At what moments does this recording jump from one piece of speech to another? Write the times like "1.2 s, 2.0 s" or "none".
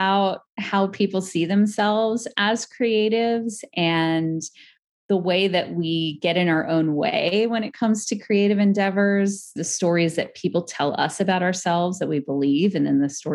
9.6 s